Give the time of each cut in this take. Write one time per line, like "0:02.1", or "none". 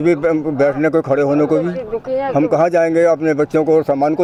none